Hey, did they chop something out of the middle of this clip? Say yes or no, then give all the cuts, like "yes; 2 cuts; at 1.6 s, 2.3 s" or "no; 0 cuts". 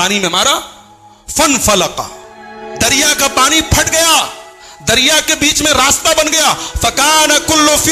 no; 0 cuts